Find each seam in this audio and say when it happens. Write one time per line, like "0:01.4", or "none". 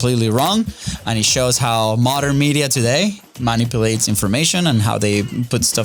none